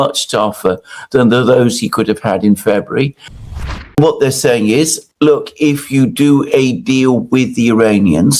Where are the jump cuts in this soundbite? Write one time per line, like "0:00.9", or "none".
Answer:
0:03.4
0:05.0